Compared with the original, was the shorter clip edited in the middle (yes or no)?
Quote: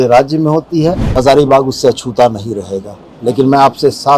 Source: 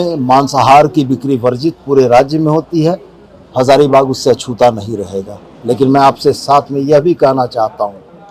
yes